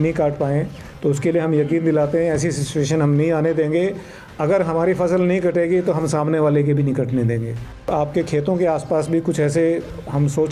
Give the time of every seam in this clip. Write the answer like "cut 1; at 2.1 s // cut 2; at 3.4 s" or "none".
cut 1; at 7.9 s